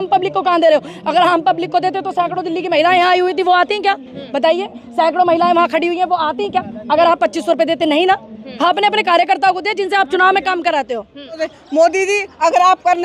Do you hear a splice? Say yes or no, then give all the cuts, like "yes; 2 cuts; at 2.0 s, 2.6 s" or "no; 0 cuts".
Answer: yes; 1 cut; at 11.4 s